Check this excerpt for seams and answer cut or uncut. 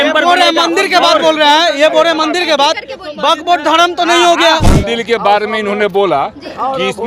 cut